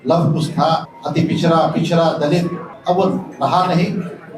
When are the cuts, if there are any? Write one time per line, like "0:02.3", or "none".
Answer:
0:01.0
0:02.7